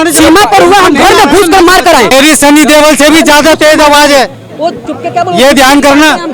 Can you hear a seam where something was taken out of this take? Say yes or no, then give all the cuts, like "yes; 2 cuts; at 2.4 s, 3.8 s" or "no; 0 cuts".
yes; 1 cut; at 2.1 s